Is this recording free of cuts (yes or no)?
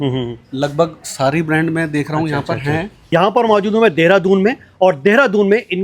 no